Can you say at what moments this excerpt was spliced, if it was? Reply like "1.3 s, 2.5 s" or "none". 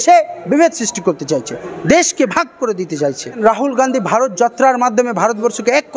1.6 s, 3.3 s